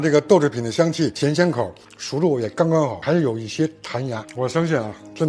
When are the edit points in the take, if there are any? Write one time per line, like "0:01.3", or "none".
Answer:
0:01.8